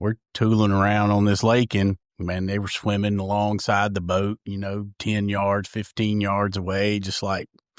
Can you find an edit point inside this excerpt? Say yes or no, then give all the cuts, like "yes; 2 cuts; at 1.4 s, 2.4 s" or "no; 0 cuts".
no; 0 cuts